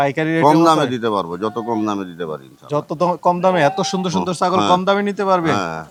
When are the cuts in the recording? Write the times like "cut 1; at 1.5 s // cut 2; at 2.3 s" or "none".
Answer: none